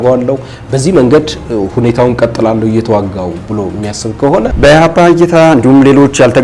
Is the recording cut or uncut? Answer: cut